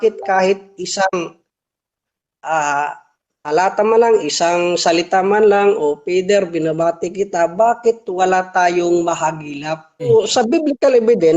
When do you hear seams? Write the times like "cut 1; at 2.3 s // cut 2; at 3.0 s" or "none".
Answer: cut 1; at 10.1 s